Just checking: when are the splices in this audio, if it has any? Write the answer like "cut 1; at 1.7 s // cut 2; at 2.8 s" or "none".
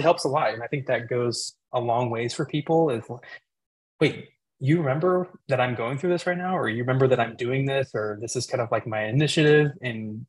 none